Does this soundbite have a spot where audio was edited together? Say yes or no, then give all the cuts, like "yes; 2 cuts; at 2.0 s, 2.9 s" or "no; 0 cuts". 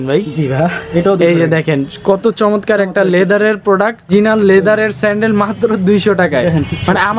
yes; 1 cut; at 4.1 s